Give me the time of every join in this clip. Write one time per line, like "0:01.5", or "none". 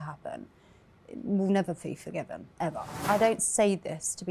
0:03.1